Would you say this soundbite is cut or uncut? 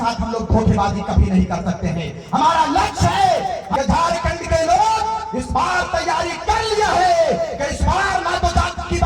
cut